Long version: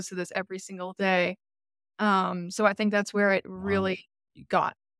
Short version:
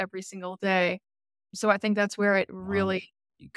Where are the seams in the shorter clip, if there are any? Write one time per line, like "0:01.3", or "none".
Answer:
0:01.5